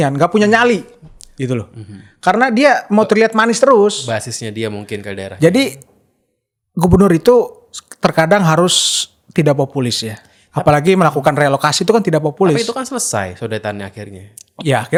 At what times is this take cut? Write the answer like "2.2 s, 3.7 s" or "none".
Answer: none